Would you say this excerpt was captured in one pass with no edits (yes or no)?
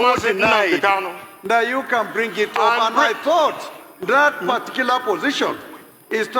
yes